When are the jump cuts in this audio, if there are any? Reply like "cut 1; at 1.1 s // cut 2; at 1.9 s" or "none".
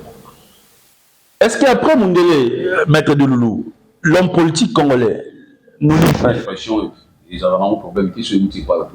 cut 1; at 6.1 s